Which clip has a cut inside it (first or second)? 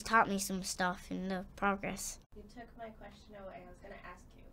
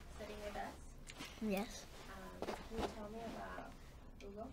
first